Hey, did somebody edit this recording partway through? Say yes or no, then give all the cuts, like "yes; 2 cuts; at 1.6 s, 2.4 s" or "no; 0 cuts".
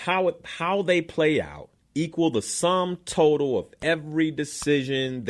no; 0 cuts